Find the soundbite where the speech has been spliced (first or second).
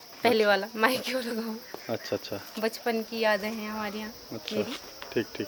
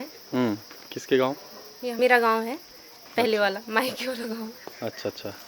second